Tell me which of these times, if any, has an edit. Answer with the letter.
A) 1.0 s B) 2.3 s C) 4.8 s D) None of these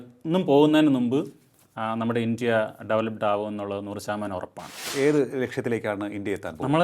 C